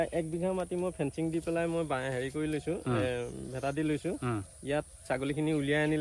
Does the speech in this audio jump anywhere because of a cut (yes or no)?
no